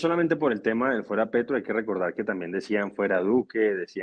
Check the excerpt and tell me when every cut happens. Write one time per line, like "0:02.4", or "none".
none